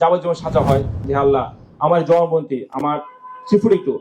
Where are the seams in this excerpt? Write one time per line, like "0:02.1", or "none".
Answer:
0:01.0